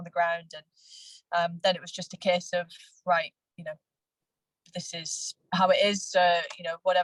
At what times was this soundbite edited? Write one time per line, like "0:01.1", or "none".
none